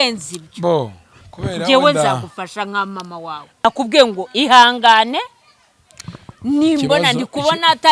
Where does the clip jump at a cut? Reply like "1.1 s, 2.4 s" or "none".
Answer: 3.6 s